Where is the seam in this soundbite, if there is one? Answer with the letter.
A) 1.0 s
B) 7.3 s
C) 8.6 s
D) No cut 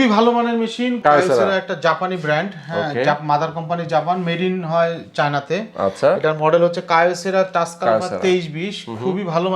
A